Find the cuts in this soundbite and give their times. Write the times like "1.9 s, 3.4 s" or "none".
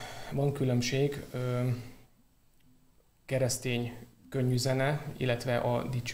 none